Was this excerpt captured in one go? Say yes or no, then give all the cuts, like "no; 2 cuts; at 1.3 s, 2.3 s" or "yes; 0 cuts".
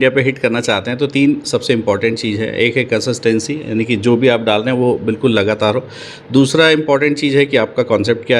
yes; 0 cuts